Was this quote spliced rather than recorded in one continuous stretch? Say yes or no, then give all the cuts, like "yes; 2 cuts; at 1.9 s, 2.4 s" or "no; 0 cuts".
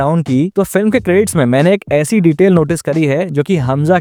no; 0 cuts